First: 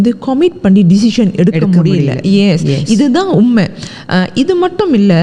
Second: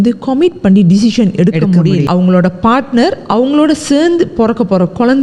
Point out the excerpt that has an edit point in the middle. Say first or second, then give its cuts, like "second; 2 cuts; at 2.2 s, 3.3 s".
second; 1 cut; at 2.0 s